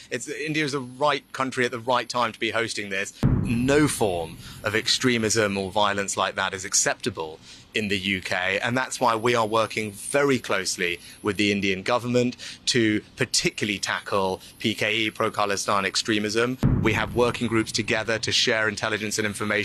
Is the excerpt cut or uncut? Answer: cut